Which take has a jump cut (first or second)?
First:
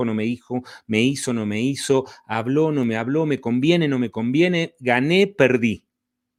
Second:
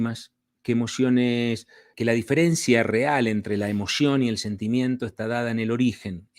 second